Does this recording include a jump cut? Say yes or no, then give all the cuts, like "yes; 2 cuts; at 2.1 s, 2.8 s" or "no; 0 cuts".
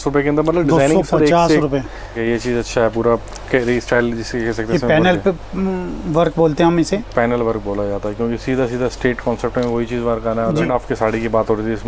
yes; 2 cuts; at 2.2 s, 10.6 s